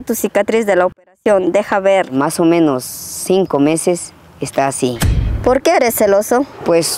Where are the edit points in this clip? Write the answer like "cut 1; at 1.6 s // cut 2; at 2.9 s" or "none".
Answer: cut 1; at 2.2 s // cut 2; at 5.4 s